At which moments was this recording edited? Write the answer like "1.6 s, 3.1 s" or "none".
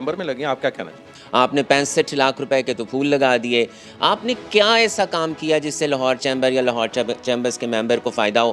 1.1 s